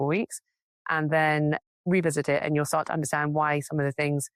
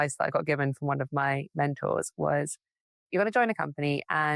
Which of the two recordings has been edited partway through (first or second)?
second